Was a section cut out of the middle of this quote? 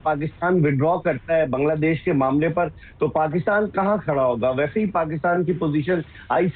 no; 0 cuts

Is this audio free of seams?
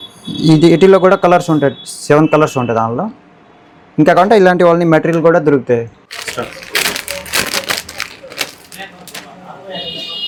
yes; 0 cuts

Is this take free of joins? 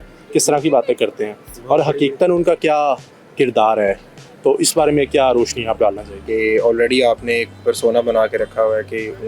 no; 1 cut; at 6.2 s

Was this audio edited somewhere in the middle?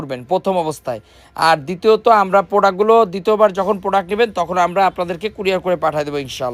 no; 0 cuts

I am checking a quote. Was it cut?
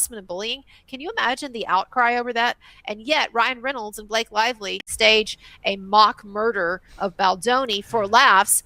yes; 1 cut; at 4.9 s

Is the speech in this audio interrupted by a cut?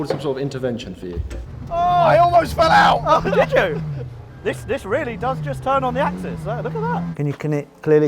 yes; 2 cuts; at 1.4 s, 7.1 s

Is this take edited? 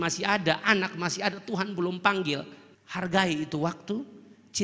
yes; 1 cut; at 2.7 s

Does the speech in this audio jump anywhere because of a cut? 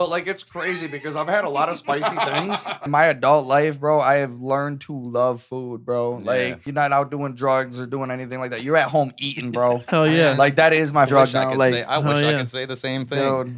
yes; 2 cuts; at 2.8 s, 6.6 s

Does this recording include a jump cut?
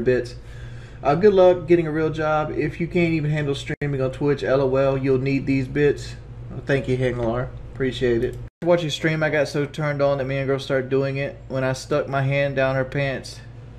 no; 0 cuts

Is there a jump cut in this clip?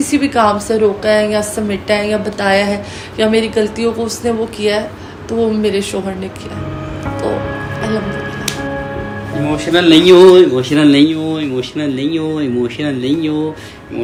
no; 0 cuts

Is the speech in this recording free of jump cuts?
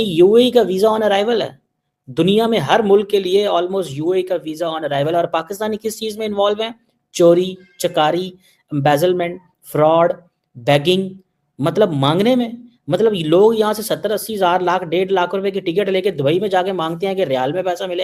yes; 0 cuts

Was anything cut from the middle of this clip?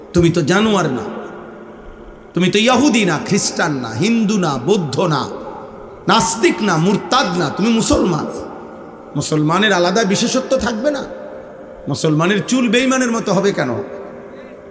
no; 0 cuts

